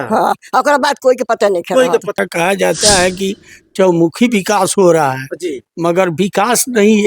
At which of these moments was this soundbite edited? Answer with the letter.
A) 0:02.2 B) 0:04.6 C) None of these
A